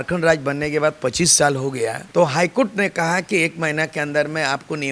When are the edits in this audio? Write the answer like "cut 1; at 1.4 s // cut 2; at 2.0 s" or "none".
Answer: cut 1; at 2.0 s